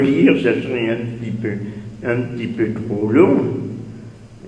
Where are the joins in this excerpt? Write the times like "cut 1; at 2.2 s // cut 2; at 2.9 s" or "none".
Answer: cut 1; at 1.4 s